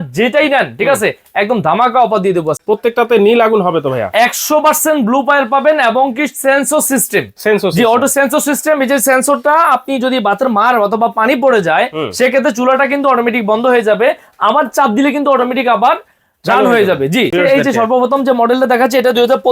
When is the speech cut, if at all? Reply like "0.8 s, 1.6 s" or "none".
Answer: 2.5 s, 17.3 s